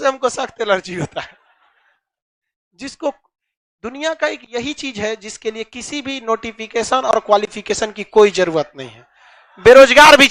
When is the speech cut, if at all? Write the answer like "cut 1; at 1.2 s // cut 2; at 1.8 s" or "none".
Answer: none